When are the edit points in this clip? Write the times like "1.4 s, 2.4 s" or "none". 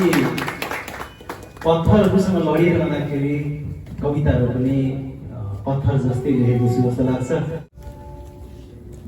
7.6 s